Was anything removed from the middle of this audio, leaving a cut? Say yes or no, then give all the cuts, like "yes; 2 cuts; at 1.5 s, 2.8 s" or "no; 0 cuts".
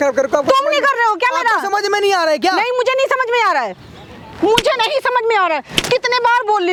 no; 0 cuts